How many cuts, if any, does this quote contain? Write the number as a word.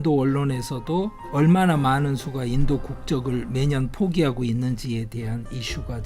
one